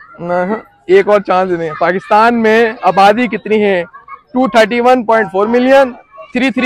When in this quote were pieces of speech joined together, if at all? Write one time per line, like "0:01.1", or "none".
none